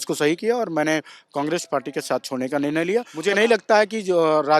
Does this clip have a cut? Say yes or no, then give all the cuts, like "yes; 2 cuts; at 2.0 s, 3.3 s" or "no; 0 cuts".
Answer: yes; 1 cut; at 3.1 s